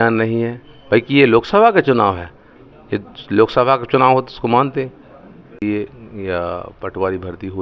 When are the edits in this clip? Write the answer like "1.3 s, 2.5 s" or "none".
5.6 s